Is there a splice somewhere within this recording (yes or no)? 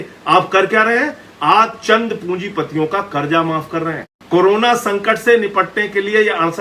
yes